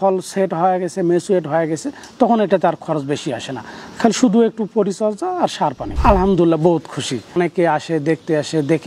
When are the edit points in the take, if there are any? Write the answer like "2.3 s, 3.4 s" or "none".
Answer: 5.9 s, 7.3 s

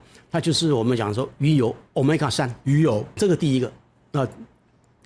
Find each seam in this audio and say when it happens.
3.2 s

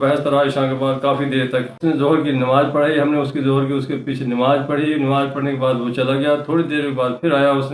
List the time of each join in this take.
1.8 s

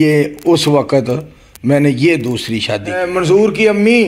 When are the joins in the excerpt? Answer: 3.0 s

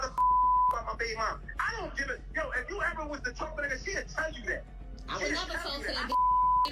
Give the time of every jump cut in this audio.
none

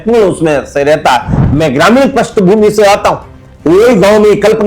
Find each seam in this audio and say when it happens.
1.3 s

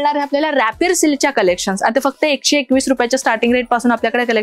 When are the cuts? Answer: none

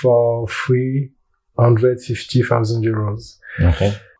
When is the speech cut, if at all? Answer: none

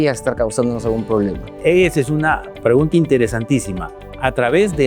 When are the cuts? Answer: 1.5 s

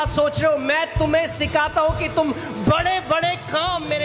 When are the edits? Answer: none

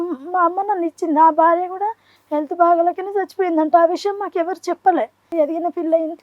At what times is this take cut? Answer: 5.3 s

